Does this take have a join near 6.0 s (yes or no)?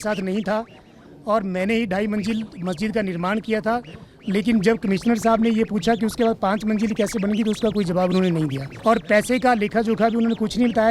no